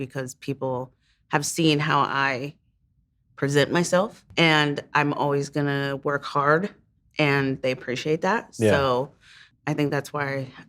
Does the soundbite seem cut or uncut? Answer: cut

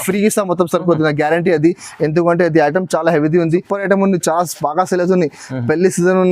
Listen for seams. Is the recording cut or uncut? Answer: cut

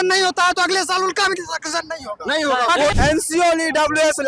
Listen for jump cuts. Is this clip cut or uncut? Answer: cut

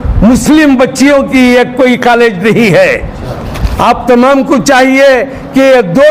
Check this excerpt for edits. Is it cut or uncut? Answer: uncut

